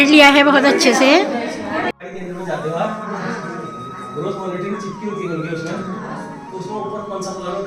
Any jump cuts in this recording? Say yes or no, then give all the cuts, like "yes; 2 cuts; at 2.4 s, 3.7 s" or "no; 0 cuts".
no; 0 cuts